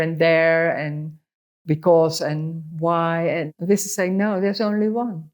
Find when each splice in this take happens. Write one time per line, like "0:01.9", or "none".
0:03.5